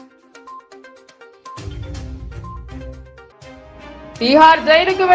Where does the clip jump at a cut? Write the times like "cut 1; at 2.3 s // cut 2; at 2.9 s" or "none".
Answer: cut 1; at 1.1 s // cut 2; at 1.6 s